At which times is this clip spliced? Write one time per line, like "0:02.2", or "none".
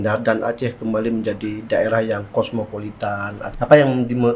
0:03.4